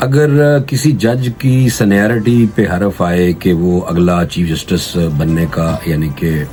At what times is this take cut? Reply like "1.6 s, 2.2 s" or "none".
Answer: none